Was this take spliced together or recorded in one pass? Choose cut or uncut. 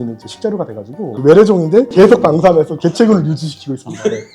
cut